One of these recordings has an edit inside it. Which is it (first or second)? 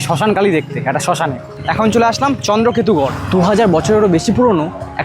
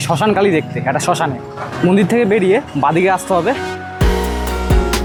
first